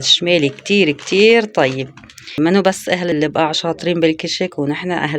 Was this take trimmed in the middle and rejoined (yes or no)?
yes